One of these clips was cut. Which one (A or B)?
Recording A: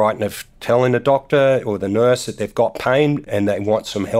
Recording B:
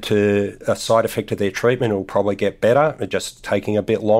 A